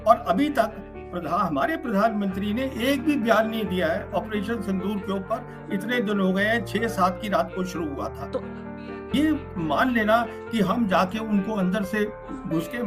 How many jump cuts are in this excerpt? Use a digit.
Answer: 1